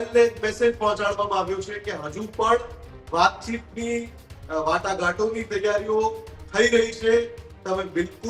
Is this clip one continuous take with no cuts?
yes; 0 cuts

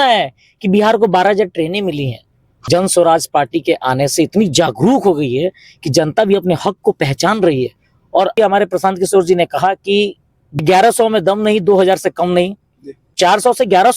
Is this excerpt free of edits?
no; 4 cuts; at 2.6 s, 8.4 s, 10.6 s, 13.1 s

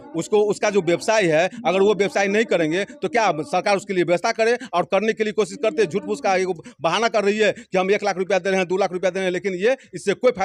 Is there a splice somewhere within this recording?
no; 0 cuts

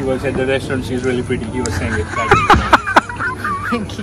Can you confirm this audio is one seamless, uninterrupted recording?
yes; 0 cuts

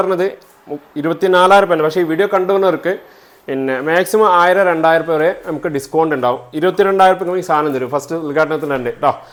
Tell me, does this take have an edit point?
no; 0 cuts

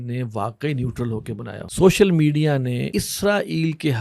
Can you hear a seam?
yes; 2 cuts; at 1.6 s, 2.8 s

